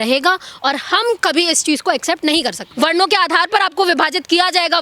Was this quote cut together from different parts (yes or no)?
yes